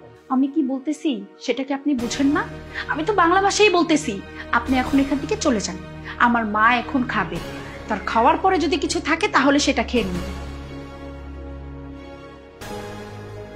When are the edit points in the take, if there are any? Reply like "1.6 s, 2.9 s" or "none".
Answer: none